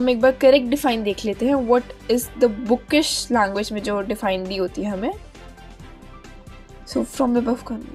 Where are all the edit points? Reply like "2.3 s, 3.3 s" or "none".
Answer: 5.2 s, 6.9 s

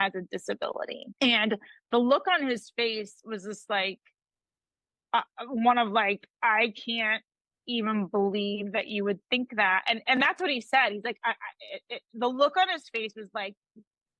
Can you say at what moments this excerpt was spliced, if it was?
1.0 s

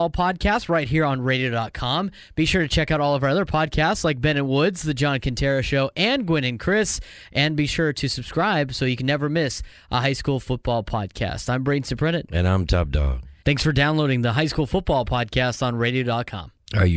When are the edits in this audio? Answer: none

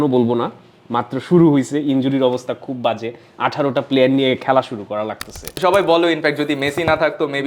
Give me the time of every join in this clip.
5.5 s

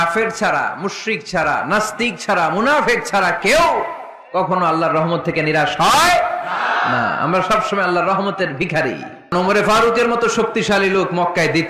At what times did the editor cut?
9.3 s

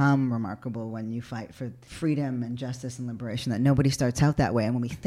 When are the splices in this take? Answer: 1.9 s

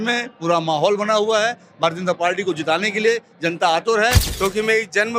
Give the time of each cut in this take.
4.3 s

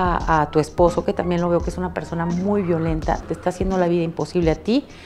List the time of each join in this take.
3.2 s

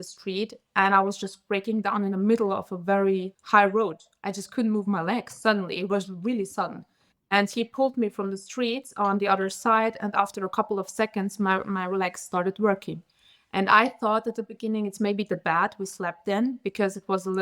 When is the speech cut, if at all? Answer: 3.3 s

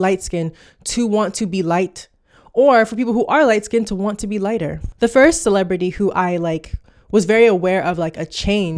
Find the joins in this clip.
none

